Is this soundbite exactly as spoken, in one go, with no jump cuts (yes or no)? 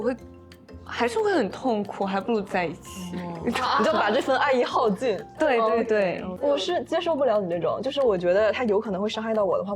yes